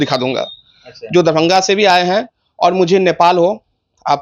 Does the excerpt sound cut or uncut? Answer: uncut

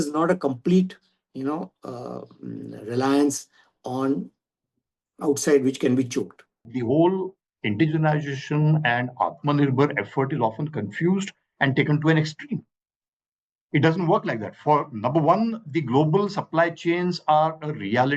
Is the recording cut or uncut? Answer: cut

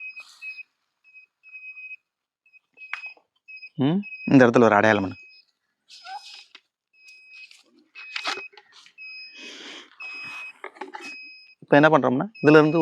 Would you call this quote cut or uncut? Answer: uncut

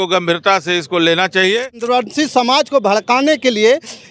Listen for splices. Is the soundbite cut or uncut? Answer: cut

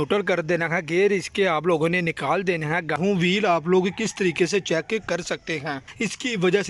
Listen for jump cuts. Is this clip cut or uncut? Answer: cut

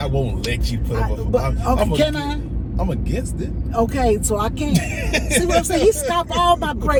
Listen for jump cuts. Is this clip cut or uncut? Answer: uncut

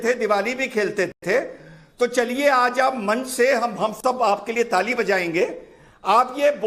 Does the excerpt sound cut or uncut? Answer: uncut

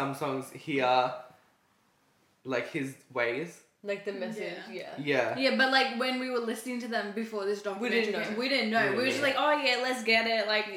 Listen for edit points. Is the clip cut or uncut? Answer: uncut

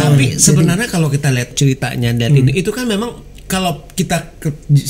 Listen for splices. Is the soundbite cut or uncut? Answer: cut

